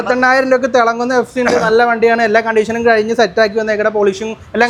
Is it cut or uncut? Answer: uncut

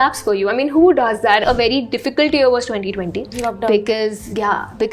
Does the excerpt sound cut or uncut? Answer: cut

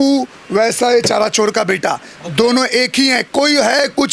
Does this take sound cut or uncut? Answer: uncut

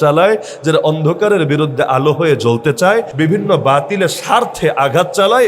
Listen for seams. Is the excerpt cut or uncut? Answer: cut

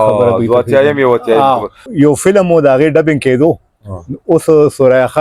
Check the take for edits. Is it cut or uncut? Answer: cut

